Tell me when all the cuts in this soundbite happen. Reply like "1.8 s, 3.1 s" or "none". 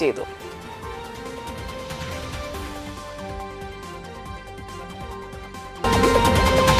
5.8 s